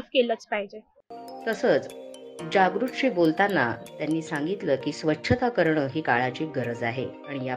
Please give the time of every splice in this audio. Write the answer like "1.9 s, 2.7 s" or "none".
none